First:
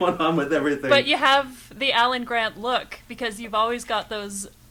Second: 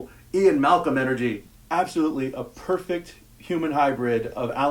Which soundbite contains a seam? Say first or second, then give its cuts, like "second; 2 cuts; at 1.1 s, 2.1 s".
second; 1 cut; at 1.4 s